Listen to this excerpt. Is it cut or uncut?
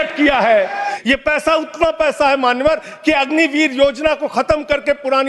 cut